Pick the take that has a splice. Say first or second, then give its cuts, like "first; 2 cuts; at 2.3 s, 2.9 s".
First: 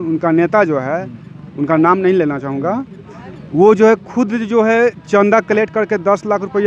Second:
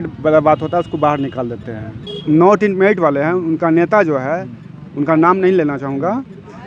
second; 1 cut; at 2.1 s